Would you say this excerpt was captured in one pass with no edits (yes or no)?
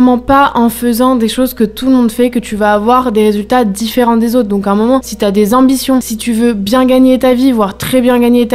yes